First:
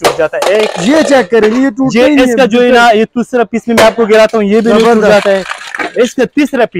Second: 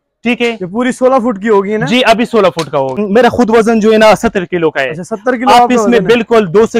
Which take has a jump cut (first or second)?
second